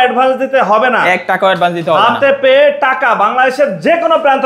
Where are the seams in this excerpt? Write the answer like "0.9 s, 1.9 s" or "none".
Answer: none